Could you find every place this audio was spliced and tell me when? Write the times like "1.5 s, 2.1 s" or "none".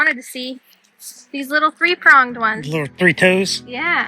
none